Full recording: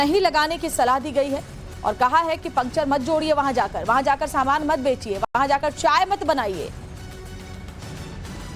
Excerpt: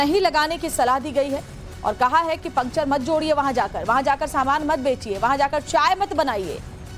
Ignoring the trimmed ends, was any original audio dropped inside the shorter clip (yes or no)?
yes